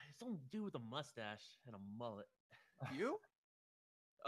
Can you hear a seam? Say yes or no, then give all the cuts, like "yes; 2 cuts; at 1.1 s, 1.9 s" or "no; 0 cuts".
yes; 1 cut; at 1.5 s